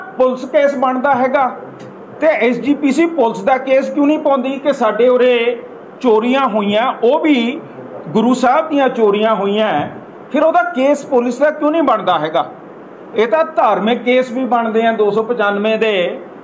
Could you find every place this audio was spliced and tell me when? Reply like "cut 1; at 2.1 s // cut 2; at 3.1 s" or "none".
none